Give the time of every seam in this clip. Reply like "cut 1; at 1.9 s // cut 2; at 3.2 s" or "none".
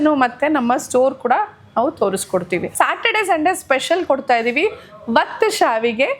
cut 1; at 2.7 s